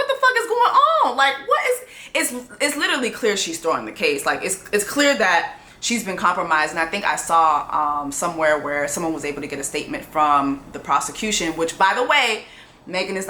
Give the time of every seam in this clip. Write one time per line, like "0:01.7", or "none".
none